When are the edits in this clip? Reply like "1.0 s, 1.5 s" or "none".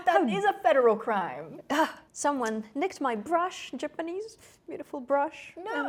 none